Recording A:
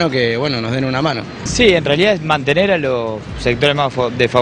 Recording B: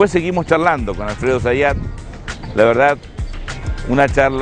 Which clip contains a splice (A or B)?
B